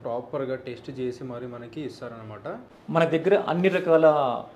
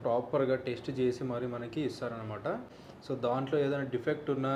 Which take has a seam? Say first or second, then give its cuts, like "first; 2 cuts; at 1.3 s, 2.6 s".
first; 1 cut; at 2.7 s